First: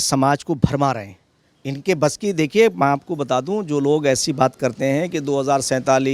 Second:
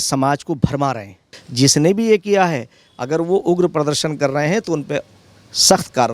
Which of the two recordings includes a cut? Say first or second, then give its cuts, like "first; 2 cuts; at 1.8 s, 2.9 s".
second; 1 cut; at 1.4 s